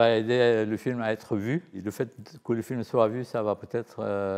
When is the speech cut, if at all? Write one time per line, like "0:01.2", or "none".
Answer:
none

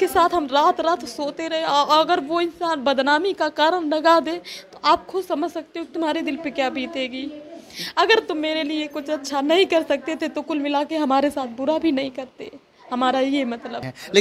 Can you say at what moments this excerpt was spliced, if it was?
none

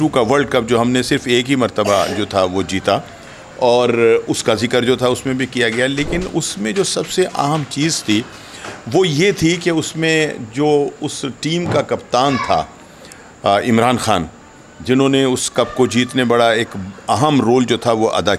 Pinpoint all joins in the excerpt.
none

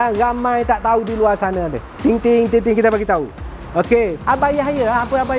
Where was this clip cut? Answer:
0:04.2

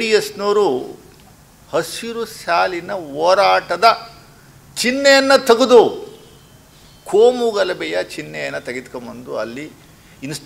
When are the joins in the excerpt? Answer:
none

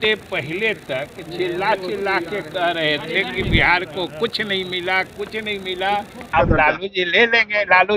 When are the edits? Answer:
0:06.3

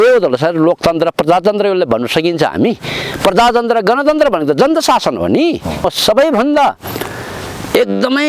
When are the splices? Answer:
0:05.7

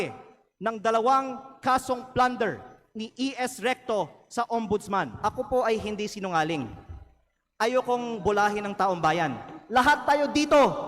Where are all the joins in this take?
0:05.1

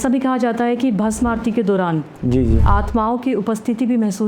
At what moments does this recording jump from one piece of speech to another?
none

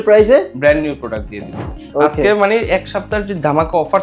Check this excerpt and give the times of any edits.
0:01.6

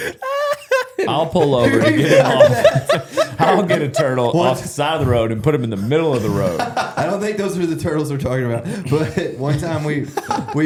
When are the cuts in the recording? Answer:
none

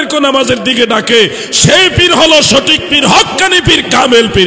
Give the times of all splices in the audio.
none

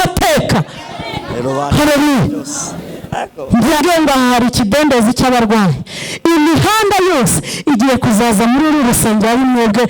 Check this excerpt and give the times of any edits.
0:03.8

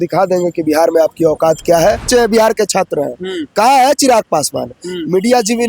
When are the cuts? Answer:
0:02.1

